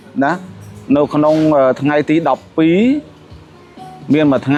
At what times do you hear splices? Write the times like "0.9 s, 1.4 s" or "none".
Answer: none